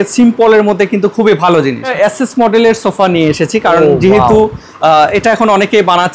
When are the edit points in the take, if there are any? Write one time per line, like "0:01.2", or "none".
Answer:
0:01.9